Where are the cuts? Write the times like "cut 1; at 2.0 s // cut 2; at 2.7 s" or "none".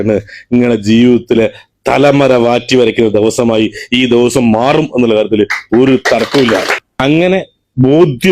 cut 1; at 6.8 s